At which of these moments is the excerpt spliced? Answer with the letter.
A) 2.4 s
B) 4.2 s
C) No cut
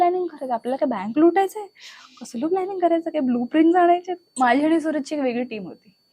B